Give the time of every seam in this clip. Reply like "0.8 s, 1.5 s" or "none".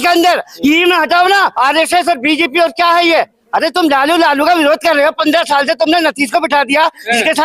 1.5 s